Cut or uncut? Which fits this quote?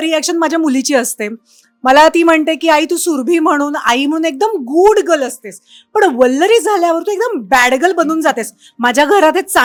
uncut